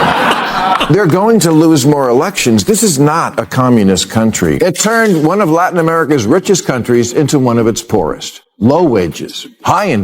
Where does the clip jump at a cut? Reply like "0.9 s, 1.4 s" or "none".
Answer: 4.5 s